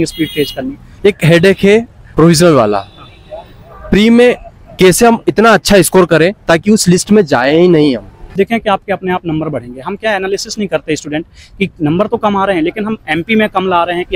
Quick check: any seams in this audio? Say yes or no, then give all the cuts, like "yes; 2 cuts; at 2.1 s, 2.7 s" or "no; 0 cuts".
yes; 2 cuts; at 0.9 s, 8.3 s